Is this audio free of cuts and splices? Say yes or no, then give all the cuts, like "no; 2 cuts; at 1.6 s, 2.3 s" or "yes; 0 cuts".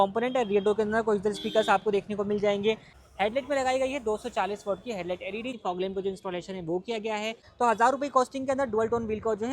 no; 3 cuts; at 3.0 s, 5.6 s, 7.4 s